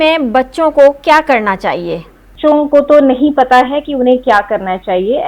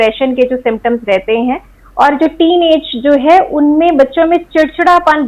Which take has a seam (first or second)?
first